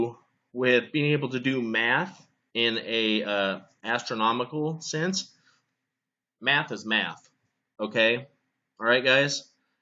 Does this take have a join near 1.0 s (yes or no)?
yes